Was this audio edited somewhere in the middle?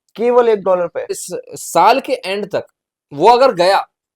yes; 1 cut; at 1.1 s

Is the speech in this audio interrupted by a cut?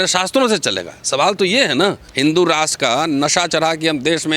yes; 1 cut; at 2.1 s

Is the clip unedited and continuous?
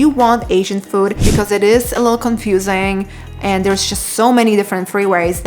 no; 1 cut; at 1.2 s

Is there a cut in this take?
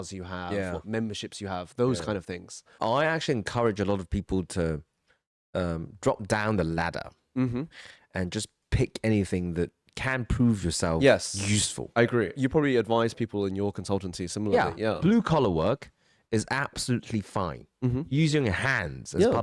yes; 1 cut; at 2.7 s

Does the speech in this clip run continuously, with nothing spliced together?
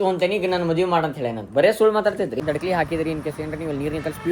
no; 1 cut; at 2.4 s

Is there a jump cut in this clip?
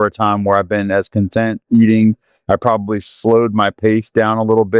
no; 0 cuts

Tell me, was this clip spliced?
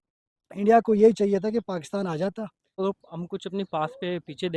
yes; 1 cut; at 2.8 s

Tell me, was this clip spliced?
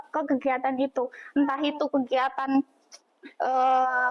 no; 0 cuts

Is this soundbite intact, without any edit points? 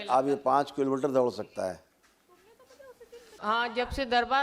yes; 0 cuts

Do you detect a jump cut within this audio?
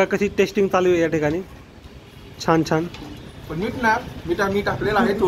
no; 0 cuts

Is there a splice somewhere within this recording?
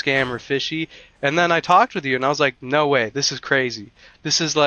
no; 0 cuts

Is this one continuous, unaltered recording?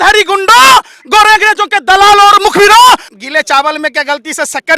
no; 1 cut; at 3.1 s

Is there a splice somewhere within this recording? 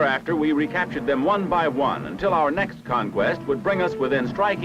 no; 0 cuts

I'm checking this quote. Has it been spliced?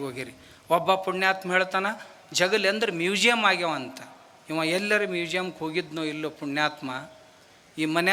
no; 0 cuts

